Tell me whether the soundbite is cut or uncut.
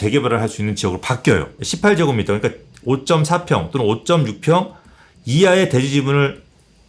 cut